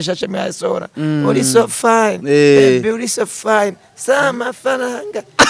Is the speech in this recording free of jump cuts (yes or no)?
yes